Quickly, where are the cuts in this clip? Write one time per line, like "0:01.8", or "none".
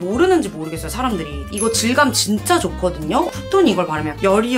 0:03.3

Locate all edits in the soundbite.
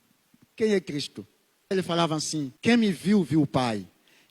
0:01.7
0:02.5

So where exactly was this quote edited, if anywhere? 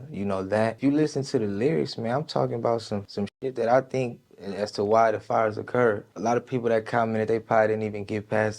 0:00.8
0:03.1
0:04.2

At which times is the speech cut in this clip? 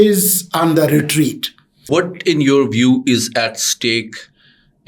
0:01.9

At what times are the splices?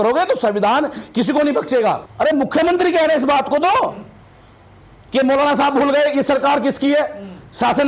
0:02.1

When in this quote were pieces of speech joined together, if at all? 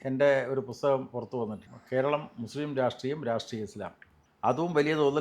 0:01.7

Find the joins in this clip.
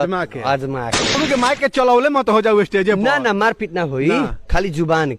0:01.1

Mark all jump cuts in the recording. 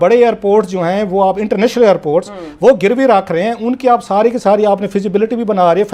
none

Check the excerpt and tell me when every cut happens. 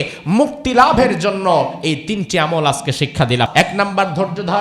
0:03.5

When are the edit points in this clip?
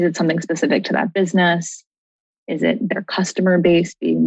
none

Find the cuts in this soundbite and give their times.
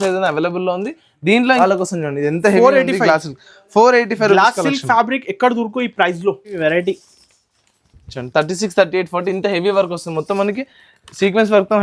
0:01.6
0:06.5

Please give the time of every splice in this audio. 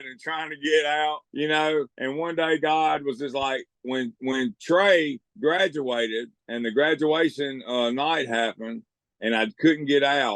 0:01.3
0:01.9
0:03.7
0:05.2
0:06.4

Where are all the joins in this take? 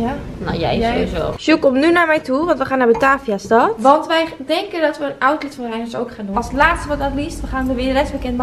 0:01.4
0:06.3

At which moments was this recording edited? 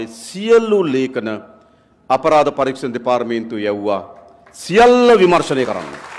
none

